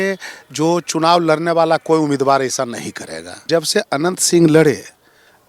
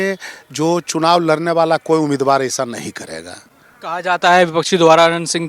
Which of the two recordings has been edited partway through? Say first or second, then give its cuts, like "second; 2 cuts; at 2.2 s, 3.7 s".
first; 1 cut; at 3.5 s